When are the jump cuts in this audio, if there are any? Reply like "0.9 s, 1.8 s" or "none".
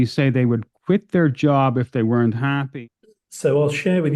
2.7 s

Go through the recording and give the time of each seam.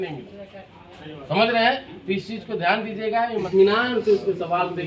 3.5 s

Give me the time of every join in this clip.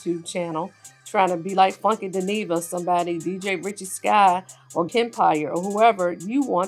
4.9 s

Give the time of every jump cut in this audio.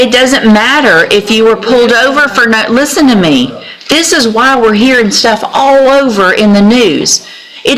none

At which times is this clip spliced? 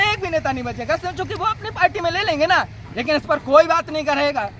none

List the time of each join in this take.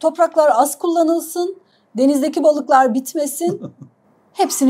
none

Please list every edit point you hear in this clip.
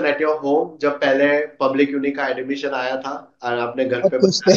none

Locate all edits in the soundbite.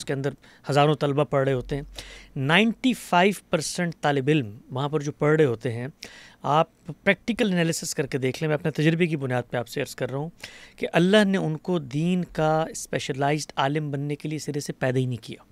none

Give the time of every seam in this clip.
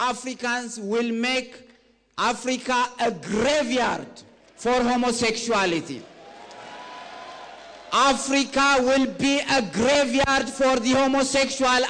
none

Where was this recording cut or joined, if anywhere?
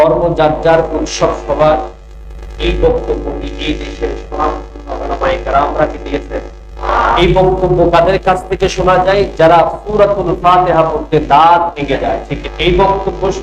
7.2 s, 12.3 s

